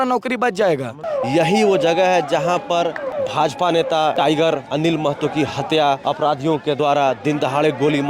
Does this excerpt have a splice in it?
yes; 4 cuts; at 1.0 s, 3.1 s, 4.3 s, 6.4 s

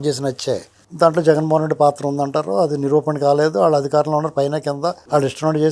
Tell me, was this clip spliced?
no; 0 cuts

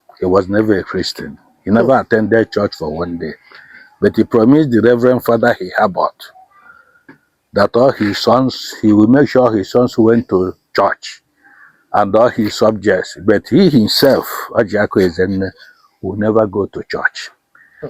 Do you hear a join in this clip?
no; 0 cuts

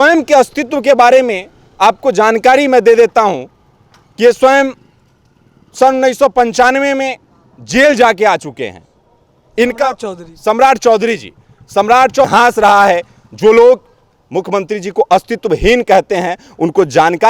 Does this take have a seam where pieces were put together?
yes; 1 cut; at 12.2 s

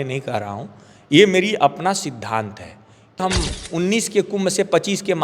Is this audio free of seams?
no; 1 cut; at 3.2 s

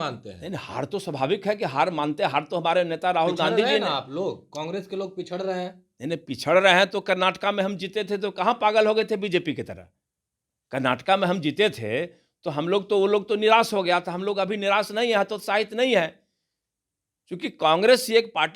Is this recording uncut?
yes; 0 cuts

